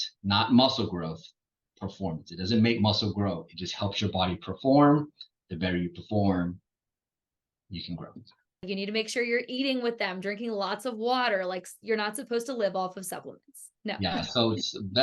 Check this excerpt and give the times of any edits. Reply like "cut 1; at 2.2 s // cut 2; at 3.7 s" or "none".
cut 1; at 8.7 s